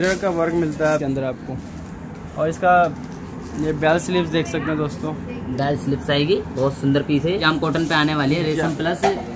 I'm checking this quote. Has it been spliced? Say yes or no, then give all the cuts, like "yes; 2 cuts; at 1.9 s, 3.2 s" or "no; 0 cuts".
yes; 2 cuts; at 1.0 s, 7.4 s